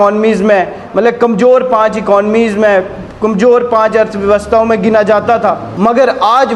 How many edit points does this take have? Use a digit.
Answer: 1